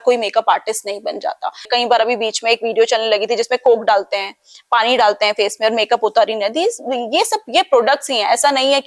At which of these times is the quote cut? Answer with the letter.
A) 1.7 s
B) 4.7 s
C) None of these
A